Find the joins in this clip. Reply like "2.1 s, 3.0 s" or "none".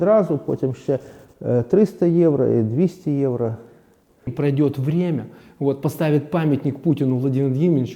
4.3 s